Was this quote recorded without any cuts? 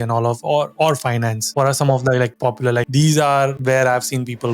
no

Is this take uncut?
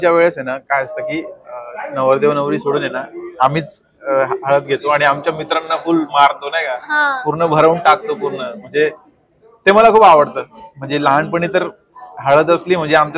yes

